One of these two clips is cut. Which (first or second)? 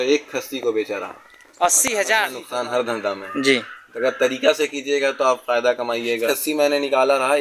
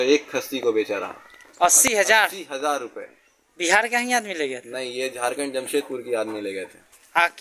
first